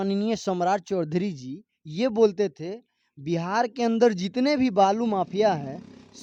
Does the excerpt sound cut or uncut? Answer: uncut